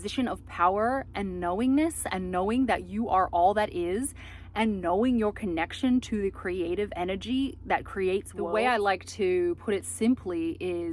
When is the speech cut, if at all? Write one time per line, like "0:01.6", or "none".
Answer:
0:08.4